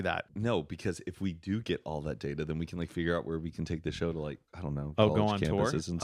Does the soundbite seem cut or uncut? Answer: uncut